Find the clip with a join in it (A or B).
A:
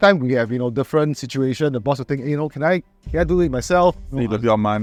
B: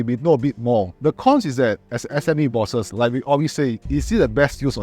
B